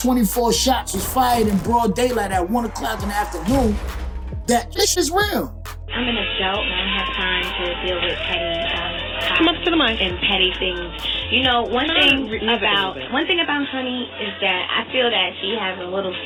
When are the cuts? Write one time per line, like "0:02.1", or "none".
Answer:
none

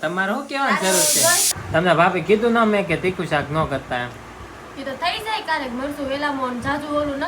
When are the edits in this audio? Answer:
0:01.4

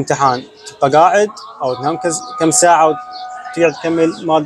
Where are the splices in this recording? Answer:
none

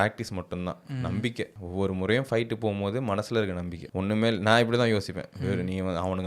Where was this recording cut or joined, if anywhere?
none

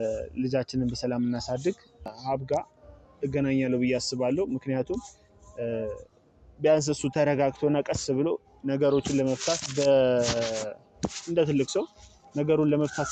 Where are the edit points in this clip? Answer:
0:02.1

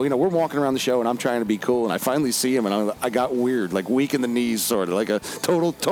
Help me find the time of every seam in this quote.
none

